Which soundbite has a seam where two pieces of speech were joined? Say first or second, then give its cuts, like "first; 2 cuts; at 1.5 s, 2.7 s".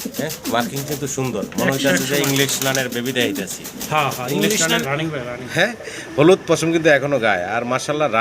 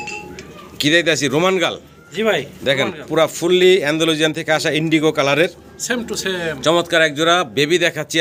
first; 1 cut; at 4.8 s